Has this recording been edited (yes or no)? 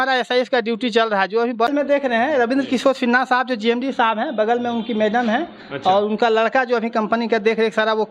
yes